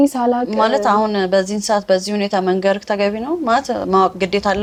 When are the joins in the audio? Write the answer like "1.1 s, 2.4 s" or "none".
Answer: none

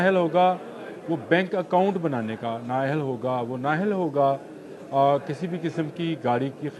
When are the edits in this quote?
none

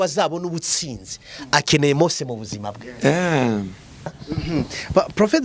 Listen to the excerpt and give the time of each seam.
4.3 s

